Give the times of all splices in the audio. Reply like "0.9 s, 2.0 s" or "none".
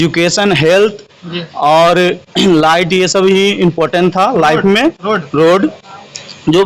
none